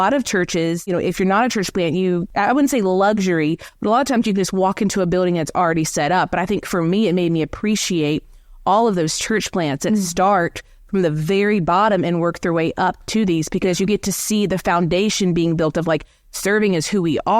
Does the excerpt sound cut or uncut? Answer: cut